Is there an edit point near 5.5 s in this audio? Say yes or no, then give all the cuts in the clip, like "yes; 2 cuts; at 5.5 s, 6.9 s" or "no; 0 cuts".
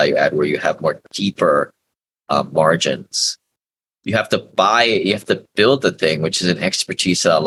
no; 0 cuts